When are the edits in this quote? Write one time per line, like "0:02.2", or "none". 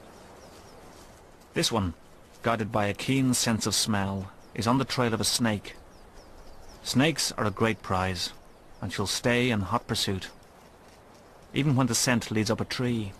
none